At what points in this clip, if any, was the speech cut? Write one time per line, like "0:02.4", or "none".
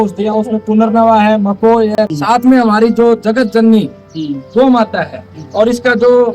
0:02.1